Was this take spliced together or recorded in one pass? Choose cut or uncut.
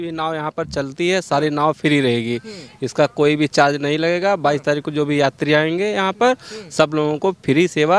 uncut